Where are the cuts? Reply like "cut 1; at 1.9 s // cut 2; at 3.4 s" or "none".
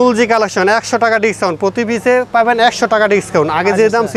none